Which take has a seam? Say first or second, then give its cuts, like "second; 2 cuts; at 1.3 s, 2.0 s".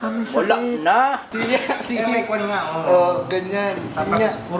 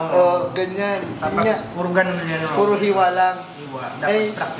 first; 1 cut; at 1.3 s